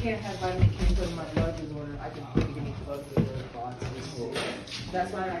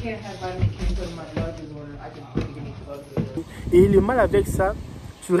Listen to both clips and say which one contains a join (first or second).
second